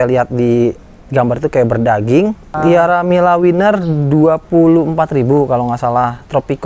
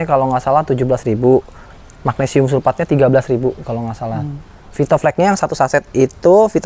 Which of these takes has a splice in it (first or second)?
first